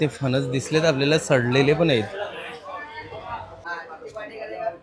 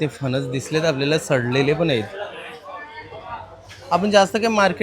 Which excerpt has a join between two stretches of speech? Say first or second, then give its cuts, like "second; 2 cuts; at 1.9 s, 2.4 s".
first; 1 cut; at 3.7 s